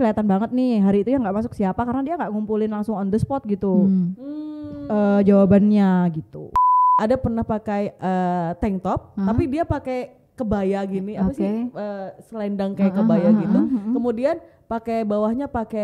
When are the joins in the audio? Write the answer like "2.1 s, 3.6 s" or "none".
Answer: 6.7 s